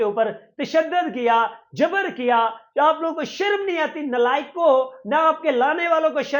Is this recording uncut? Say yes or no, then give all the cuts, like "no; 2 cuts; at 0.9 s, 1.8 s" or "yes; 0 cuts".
yes; 0 cuts